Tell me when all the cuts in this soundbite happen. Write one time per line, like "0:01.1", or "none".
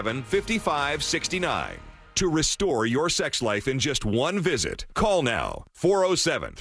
0:01.7

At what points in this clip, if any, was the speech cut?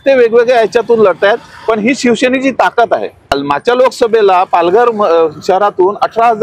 none

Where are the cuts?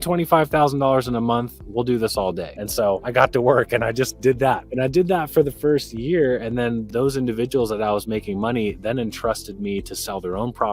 0:02.9
0:04.7
0:06.8

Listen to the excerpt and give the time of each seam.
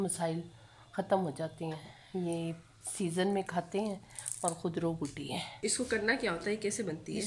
0:05.6

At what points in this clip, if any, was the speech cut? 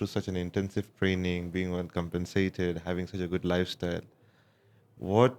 none

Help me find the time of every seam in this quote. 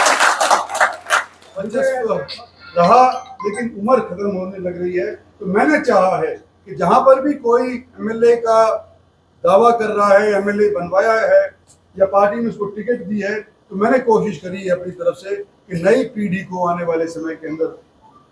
0:02.2

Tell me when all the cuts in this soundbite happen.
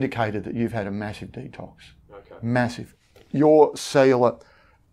0:02.8

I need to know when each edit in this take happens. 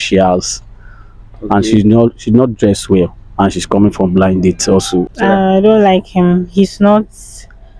0:05.1

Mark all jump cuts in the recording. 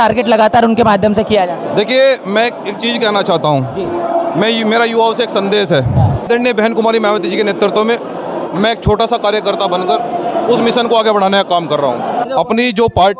0:06.3
0:12.2

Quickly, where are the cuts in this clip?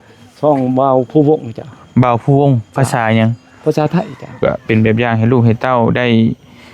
0:04.4

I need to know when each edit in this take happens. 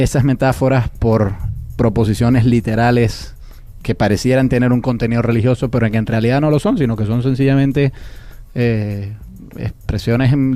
none

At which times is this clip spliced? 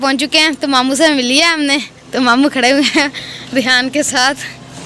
none

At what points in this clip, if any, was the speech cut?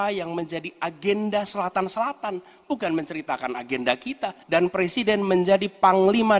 0:04.4

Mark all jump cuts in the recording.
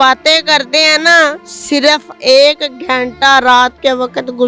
none

